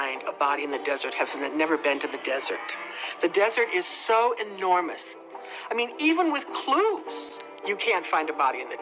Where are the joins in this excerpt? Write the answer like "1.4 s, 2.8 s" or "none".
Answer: none

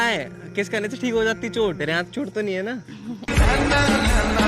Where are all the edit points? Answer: 1.8 s

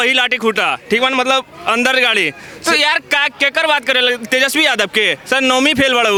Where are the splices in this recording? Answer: none

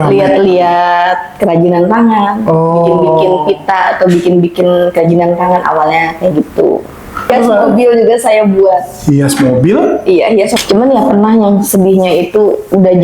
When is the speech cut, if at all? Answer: 7.3 s, 10.5 s

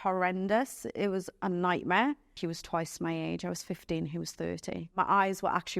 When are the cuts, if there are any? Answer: 2.3 s, 5.0 s

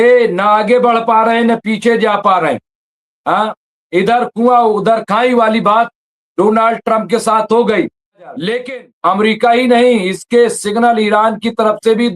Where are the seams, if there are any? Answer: 8.6 s

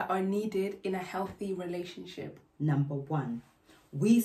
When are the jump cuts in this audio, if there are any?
none

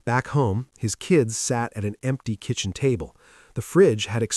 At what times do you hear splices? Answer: none

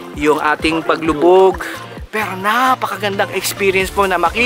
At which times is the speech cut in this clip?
1.7 s

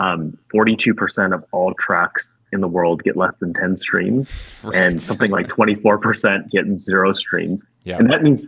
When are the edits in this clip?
none

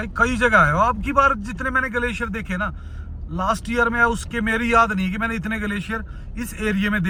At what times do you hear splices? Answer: none

